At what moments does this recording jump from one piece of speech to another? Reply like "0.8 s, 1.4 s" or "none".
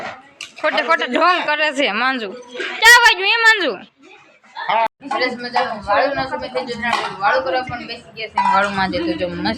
4.9 s